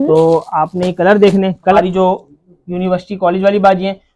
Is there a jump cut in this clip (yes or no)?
yes